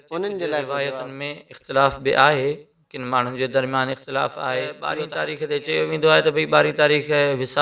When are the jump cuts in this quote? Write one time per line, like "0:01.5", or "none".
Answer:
0:01.1
0:04.9